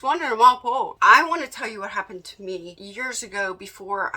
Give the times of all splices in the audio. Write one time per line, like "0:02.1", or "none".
0:00.9
0:02.8